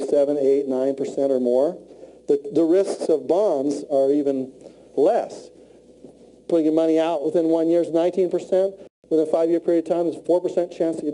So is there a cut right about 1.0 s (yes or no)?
yes